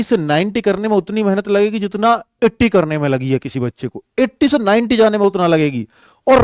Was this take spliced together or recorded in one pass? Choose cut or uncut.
uncut